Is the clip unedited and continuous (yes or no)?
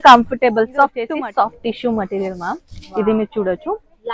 no